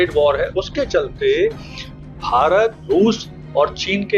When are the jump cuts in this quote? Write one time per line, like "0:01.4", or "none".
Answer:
0:02.8